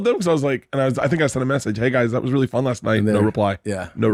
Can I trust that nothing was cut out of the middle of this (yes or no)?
yes